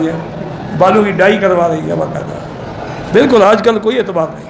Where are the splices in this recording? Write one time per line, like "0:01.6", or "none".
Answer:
none